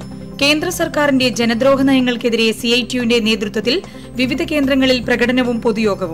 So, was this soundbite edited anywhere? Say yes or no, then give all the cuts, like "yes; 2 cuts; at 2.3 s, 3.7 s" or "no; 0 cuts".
no; 0 cuts